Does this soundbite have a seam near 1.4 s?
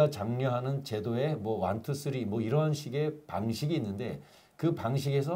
no; 0 cuts

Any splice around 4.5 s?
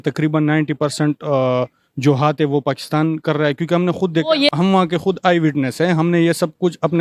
yes; 1 cut; at 4.5 s

